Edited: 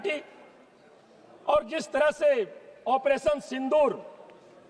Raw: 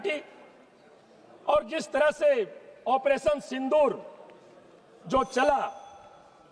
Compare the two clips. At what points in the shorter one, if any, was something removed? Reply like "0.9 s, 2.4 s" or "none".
none